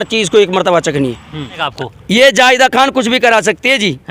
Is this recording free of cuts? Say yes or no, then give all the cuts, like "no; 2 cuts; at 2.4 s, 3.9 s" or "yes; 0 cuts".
no; 1 cut; at 1.7 s